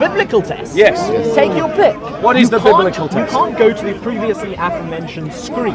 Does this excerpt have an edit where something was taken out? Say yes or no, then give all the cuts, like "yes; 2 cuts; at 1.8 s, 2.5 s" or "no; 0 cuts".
no; 0 cuts